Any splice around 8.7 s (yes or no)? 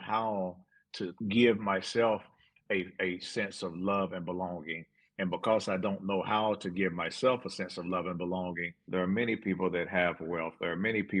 yes